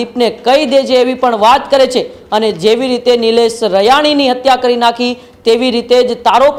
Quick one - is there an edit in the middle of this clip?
no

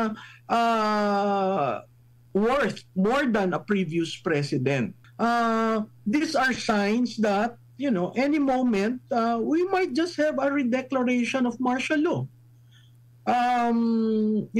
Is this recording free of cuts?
no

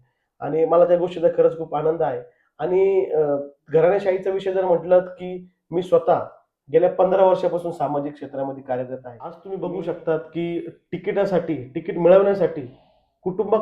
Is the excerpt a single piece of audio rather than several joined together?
no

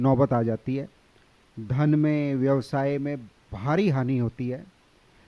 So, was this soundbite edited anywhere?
no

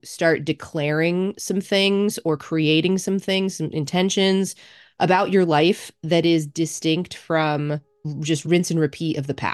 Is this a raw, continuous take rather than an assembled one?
no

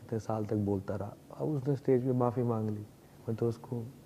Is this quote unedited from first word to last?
no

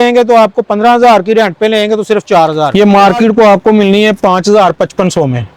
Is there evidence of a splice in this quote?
yes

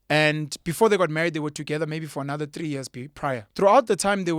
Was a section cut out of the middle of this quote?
yes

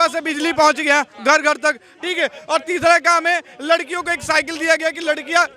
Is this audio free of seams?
yes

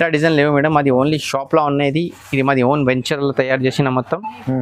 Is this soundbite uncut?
yes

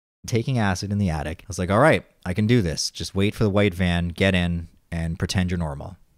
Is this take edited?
yes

